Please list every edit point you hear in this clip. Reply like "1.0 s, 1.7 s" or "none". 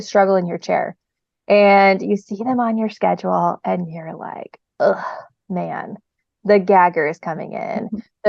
none